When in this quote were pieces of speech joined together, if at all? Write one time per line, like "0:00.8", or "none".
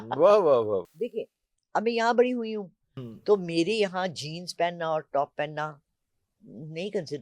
0:00.9

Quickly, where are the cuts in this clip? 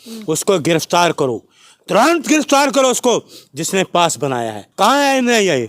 0:04.6

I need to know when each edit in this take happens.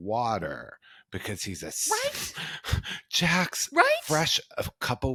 none

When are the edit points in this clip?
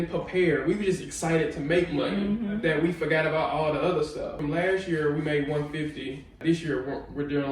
0:04.3
0:06.4

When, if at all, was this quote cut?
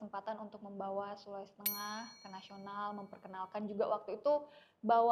none

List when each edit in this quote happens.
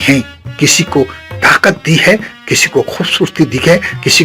none

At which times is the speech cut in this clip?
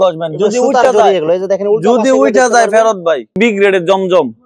0:03.4

